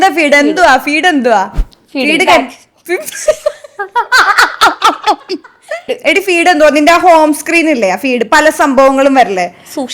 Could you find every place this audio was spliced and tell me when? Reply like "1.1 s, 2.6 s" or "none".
5.9 s